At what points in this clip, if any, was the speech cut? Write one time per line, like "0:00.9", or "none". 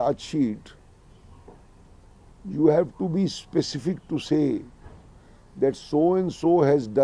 none